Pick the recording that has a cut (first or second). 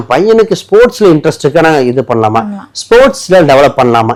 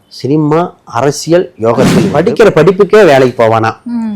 second